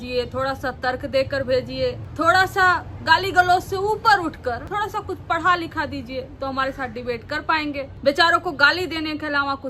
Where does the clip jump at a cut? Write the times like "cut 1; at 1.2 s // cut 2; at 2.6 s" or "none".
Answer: cut 1; at 2.1 s // cut 2; at 4.6 s // cut 3; at 7.9 s